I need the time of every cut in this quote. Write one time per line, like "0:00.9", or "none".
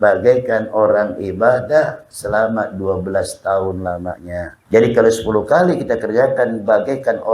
0:04.6